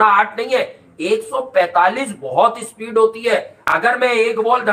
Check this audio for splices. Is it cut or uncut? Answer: uncut